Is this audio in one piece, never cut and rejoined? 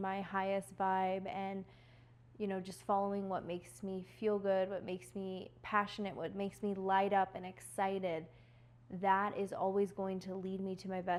yes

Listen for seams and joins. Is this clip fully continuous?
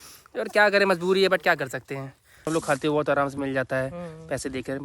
no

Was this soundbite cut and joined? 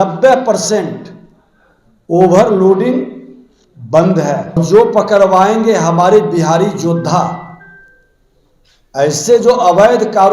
yes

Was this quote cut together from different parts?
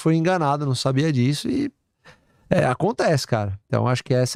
no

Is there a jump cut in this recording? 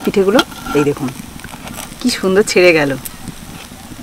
no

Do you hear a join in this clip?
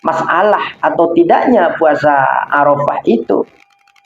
no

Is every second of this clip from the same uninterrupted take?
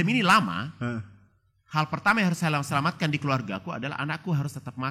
yes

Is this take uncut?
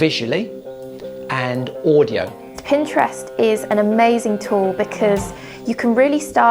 no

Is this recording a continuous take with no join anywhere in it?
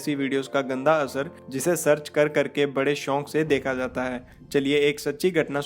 no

